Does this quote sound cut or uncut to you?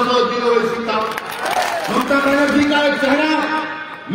cut